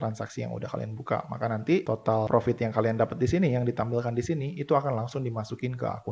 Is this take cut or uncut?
uncut